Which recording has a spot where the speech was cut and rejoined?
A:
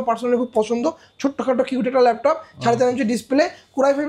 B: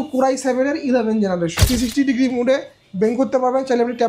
B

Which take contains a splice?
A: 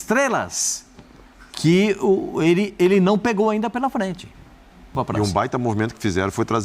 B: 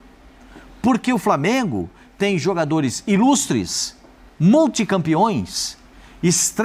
A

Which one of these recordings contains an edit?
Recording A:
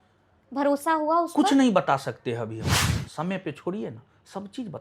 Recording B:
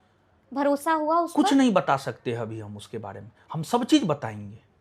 A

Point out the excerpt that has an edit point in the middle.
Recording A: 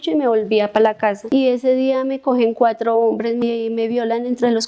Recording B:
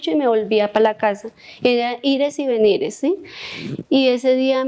A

